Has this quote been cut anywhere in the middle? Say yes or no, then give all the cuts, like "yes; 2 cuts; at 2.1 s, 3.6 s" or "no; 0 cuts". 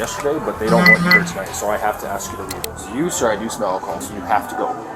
yes; 2 cuts; at 2.6 s, 4.0 s